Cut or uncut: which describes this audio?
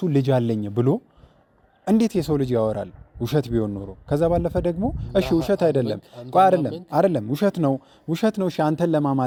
uncut